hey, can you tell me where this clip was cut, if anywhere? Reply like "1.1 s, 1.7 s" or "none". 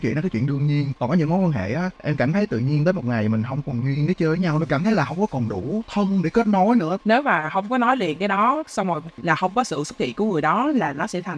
7.0 s, 9.1 s